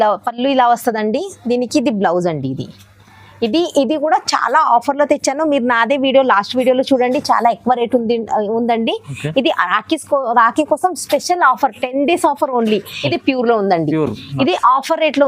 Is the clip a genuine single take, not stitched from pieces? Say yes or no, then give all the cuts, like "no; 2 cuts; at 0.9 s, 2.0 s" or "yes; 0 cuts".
no; 1 cut; at 12.9 s